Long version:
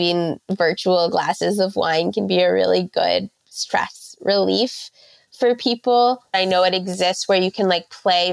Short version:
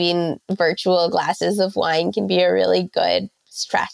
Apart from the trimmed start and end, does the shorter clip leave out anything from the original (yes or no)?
no